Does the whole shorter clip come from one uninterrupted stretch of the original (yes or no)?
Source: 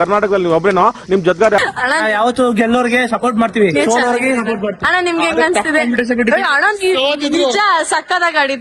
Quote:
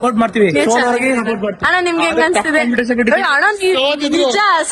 yes